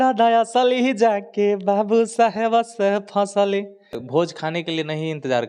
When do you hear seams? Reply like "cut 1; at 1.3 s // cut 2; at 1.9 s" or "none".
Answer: cut 1; at 4.0 s